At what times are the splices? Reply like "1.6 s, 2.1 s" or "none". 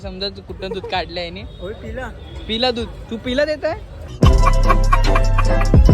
4.0 s